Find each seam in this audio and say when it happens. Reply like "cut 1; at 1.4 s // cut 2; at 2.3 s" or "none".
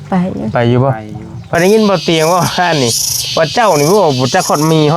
cut 1; at 1.5 s